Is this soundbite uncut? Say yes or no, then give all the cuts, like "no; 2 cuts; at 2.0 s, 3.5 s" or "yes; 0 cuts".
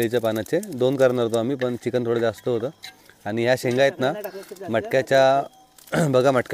yes; 0 cuts